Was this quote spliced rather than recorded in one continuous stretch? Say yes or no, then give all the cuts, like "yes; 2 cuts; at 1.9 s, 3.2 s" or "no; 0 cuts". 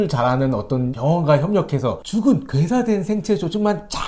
yes; 2 cuts; at 0.9 s, 2.0 s